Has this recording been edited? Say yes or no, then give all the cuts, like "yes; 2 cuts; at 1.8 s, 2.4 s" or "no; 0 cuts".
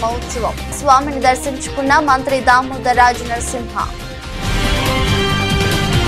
no; 0 cuts